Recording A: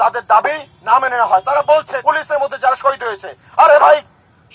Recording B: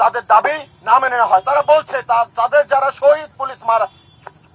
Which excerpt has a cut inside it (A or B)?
A